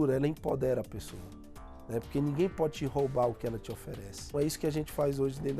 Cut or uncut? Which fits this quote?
cut